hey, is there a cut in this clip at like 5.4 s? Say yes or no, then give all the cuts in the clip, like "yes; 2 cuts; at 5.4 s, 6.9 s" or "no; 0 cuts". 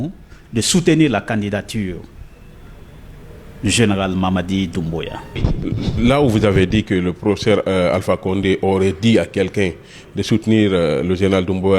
yes; 1 cut; at 5.4 s